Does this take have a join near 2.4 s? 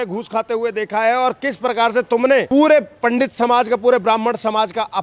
no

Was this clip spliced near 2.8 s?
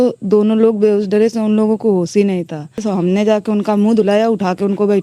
yes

